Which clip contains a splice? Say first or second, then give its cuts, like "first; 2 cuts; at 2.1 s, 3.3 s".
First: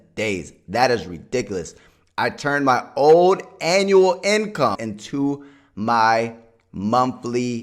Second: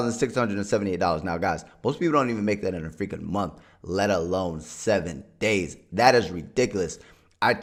first; 1 cut; at 4.8 s